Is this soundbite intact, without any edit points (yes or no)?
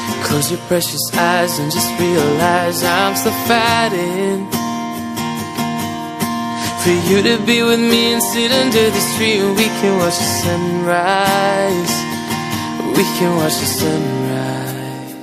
yes